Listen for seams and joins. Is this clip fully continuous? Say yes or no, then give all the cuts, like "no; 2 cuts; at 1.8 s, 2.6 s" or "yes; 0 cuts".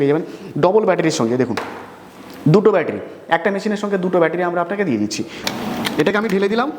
no; 1 cut; at 5.4 s